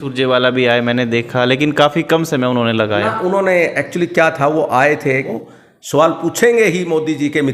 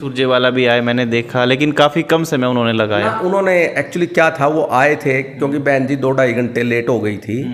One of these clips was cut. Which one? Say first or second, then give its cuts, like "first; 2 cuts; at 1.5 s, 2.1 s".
first; 1 cut; at 5.3 s